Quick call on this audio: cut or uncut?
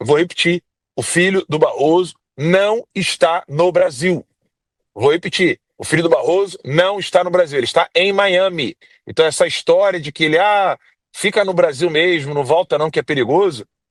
uncut